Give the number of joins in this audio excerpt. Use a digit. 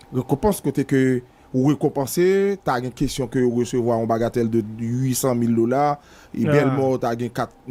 0